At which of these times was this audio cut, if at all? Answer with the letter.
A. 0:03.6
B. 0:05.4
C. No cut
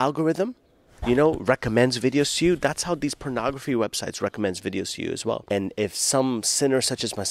B